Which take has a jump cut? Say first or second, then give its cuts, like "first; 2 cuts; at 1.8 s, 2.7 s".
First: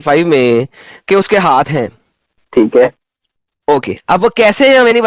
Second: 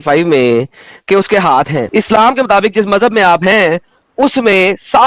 second; 1 cut; at 1.8 s